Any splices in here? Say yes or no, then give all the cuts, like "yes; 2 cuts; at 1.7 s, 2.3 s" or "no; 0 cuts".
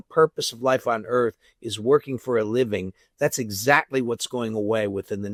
no; 0 cuts